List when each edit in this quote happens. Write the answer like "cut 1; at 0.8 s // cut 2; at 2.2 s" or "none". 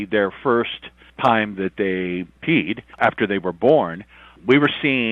cut 1; at 2.5 s